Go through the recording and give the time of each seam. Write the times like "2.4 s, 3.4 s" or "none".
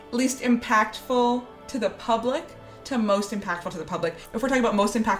none